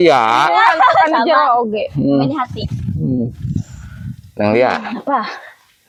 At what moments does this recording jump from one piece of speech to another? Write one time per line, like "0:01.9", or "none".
none